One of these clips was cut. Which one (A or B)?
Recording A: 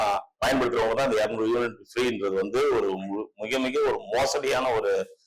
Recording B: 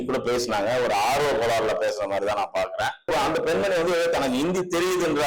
B